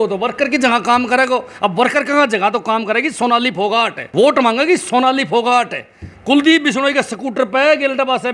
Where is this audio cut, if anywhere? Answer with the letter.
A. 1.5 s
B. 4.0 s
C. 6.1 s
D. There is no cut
B